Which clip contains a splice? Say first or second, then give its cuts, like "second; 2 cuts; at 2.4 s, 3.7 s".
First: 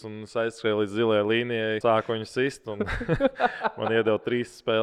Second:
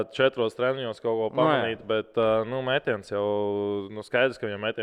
first; 1 cut; at 1.8 s